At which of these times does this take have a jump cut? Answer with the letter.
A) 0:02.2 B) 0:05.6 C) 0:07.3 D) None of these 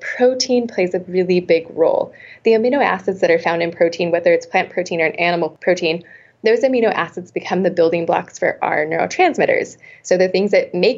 B